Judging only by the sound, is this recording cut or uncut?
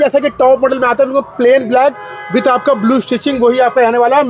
uncut